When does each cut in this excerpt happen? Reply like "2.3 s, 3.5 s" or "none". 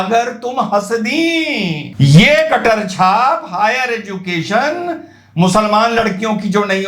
none